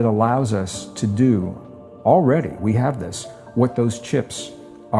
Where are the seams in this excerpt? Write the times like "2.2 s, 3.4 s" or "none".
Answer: none